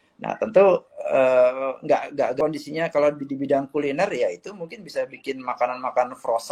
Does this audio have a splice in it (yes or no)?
yes